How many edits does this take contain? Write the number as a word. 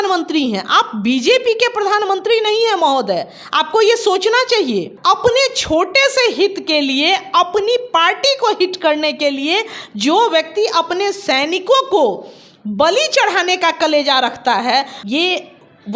two